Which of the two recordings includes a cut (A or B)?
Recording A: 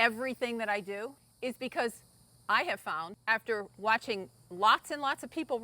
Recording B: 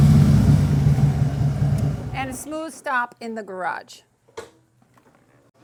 A